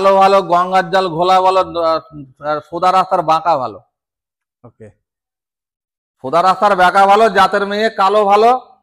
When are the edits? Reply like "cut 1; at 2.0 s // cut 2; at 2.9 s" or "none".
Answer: none